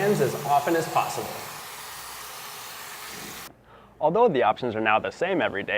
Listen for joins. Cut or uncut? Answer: cut